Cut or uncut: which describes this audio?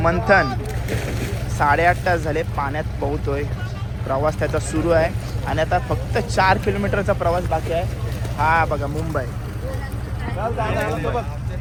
uncut